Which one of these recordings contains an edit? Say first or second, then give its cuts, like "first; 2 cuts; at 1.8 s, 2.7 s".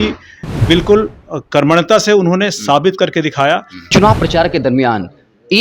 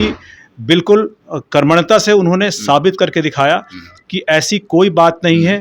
first; 1 cut; at 3.9 s